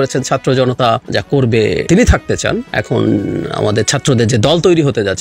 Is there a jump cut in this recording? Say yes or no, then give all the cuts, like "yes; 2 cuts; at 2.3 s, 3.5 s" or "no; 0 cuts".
yes; 3 cuts; at 1.0 s, 1.9 s, 2.7 s